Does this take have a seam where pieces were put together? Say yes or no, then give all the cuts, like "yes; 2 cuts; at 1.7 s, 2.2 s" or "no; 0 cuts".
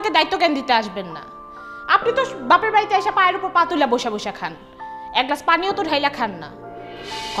no; 0 cuts